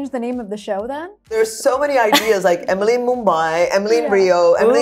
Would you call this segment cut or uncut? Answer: cut